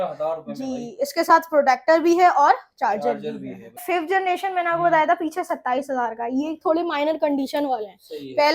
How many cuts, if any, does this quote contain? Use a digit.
1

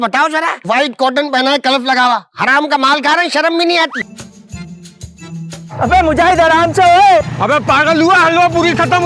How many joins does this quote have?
1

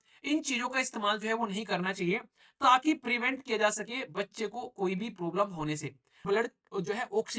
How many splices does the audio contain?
1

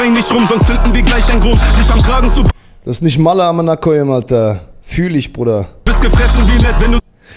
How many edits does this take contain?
1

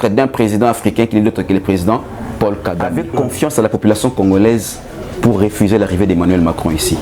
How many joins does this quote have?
1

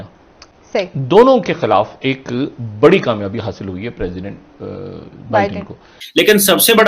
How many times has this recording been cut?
1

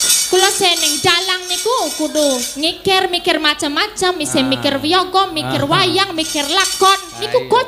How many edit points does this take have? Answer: 0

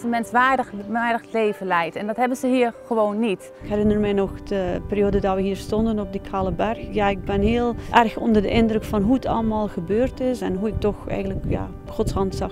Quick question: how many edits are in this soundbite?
4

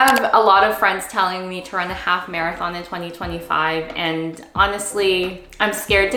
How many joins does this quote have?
0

